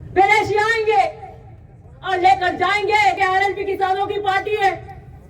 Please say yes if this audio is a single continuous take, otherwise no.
no